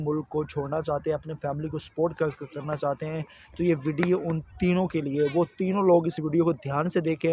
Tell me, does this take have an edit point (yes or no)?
no